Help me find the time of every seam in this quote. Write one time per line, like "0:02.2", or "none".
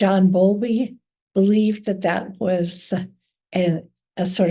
none